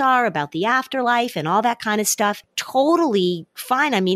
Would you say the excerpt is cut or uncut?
uncut